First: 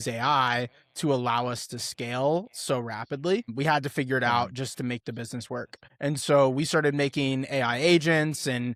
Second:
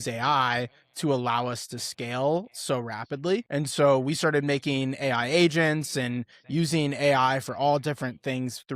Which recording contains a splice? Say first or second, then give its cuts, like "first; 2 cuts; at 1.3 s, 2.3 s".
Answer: second; 1 cut; at 3.5 s